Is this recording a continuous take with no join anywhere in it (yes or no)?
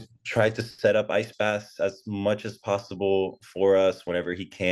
yes